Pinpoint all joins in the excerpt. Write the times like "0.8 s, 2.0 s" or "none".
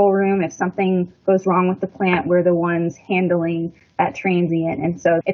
none